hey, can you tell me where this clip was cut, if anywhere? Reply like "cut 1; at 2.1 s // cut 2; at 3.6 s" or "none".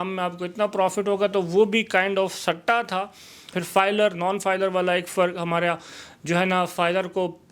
cut 1; at 3.6 s